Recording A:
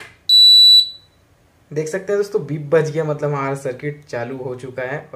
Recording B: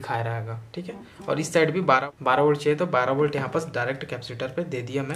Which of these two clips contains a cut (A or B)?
B